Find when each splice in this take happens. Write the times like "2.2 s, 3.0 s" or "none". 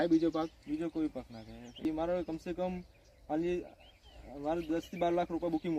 1.8 s

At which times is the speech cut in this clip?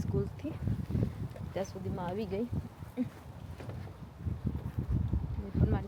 none

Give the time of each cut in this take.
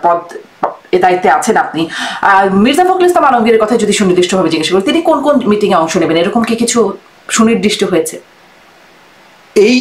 none

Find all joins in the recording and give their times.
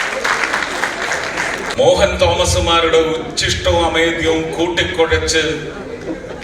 1.7 s

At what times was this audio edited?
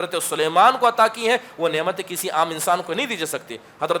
none

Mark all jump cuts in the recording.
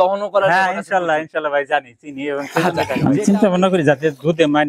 2.9 s

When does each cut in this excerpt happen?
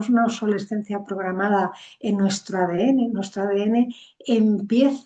none

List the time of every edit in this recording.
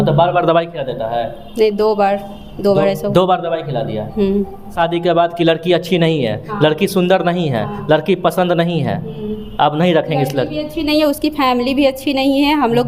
4.7 s

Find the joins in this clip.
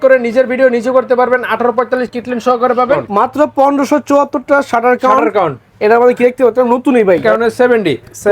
3.1 s, 7.2 s

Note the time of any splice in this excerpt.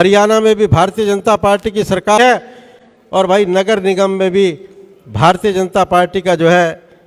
2.2 s

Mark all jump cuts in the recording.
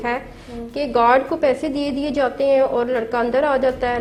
none

